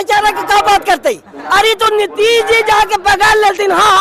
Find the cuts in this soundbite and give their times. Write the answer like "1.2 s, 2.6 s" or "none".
1.4 s